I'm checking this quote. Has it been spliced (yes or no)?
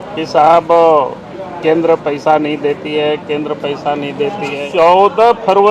yes